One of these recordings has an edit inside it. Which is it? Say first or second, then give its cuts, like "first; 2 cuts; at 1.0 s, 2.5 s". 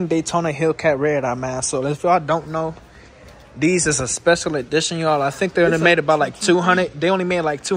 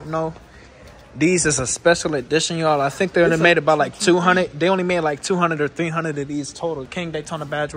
second; 1 cut; at 6.9 s